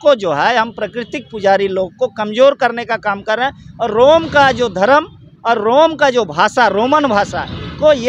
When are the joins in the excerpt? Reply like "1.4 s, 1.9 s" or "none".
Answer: none